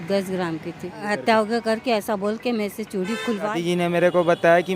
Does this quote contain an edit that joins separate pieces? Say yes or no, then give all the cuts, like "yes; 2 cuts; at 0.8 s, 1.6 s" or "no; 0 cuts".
yes; 2 cuts; at 1.0 s, 3.6 s